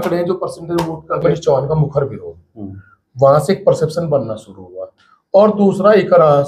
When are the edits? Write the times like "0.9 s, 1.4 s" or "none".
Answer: 1.2 s

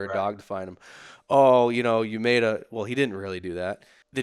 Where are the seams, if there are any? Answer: none

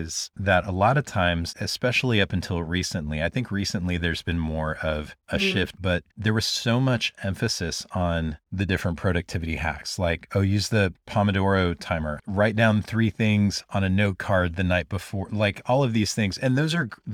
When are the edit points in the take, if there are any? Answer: 1.5 s, 5.8 s

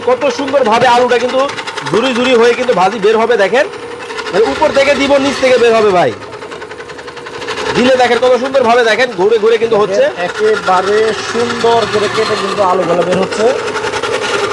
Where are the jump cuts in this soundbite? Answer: none

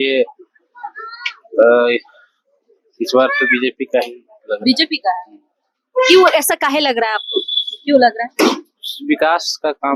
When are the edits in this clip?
none

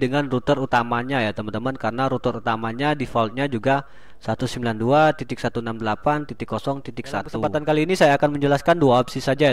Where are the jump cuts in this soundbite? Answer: 7.4 s

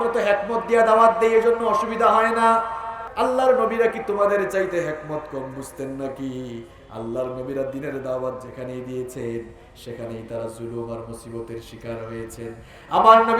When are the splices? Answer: 3.0 s

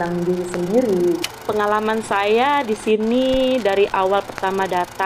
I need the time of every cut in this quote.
1.3 s

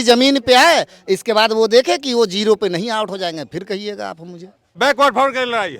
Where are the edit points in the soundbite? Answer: 4.7 s

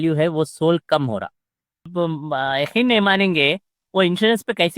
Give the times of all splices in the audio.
1.9 s

